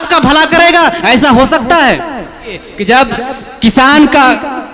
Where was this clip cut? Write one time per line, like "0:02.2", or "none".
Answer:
0:02.8

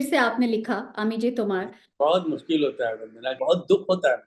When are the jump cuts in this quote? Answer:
0:01.8
0:03.4

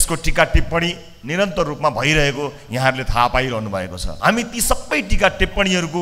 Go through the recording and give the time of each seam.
0:04.0

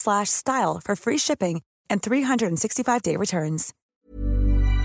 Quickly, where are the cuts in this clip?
0:03.8

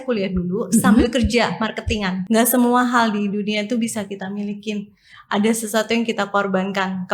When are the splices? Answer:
0:02.2

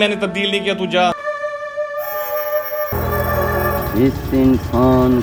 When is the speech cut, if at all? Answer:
0:01.2
0:02.9

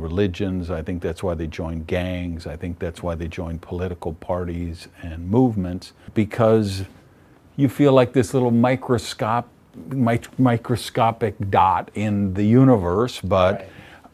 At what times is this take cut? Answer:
0:06.1

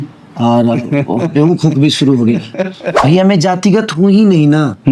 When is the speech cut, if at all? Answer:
0:02.9

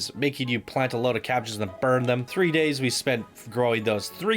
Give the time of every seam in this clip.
0:02.3

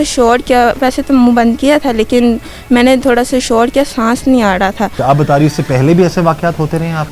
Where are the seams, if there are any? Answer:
0:04.9

